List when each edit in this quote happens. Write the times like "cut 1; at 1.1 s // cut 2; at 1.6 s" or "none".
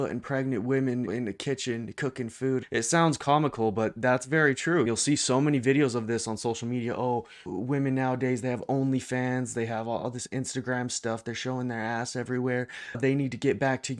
cut 1; at 1.1 s // cut 2; at 2.7 s // cut 3; at 4.9 s // cut 4; at 7.4 s